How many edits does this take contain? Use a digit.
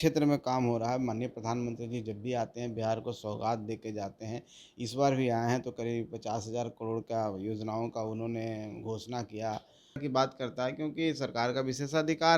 1